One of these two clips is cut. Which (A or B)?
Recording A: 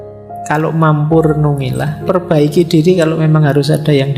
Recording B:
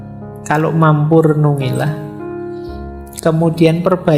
A